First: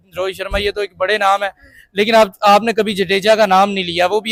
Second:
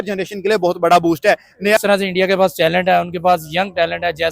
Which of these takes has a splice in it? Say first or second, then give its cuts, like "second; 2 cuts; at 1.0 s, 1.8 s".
second; 1 cut; at 1.8 s